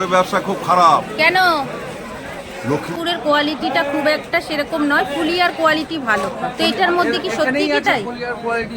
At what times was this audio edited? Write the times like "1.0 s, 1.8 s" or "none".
2.9 s